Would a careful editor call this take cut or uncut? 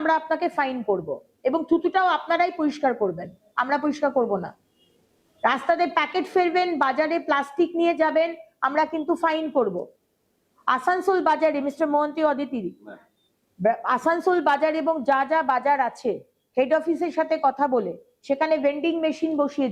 uncut